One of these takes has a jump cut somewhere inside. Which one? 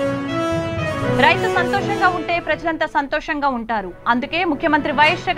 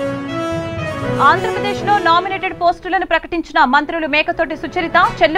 first; 1 cut; at 0.9 s

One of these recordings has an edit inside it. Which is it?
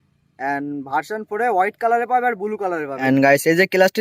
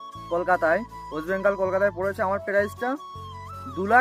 first; 1 cut; at 3.0 s

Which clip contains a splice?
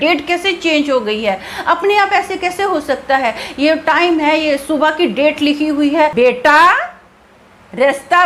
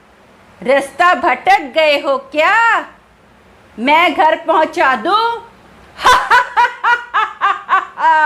first; 1 cut; at 6.1 s

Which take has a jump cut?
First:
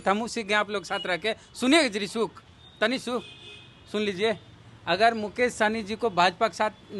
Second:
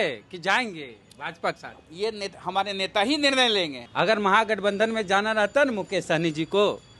second; 1 cut; at 3.8 s

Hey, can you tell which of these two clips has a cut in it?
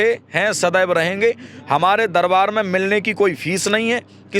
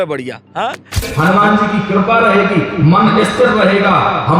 second; 1 cut; at 1.0 s

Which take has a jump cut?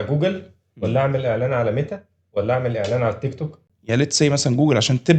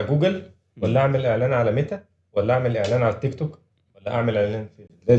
first; 1 cut; at 3.7 s

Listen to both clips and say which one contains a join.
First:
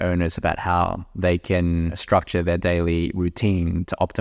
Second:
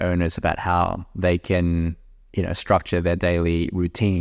first; 1 cut; at 2.0 s

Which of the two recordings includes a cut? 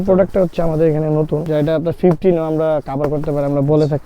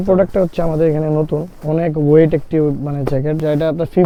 first; 1 cut; at 1.5 s

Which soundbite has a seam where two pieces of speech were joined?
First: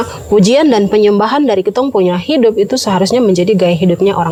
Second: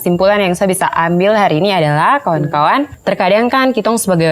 second; 1 cut; at 2.9 s

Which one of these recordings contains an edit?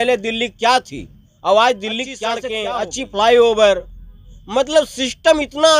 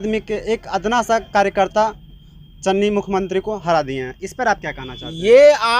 first; 1 cut; at 2.5 s

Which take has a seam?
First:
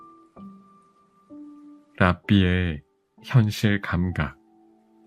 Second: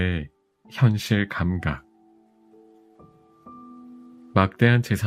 first; 1 cut; at 1.4 s

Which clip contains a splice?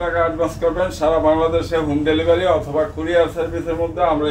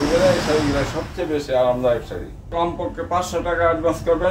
second; 1 cut; at 2.5 s

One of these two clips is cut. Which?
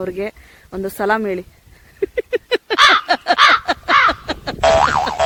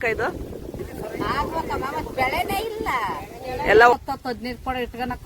second; 2 cuts; at 0.9 s, 3.9 s

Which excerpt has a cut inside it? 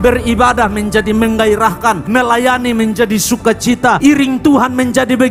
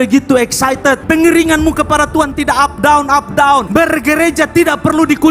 second; 2 cuts; at 1.0 s, 3.7 s

